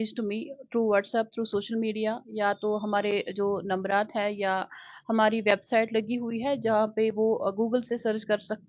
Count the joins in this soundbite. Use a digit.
0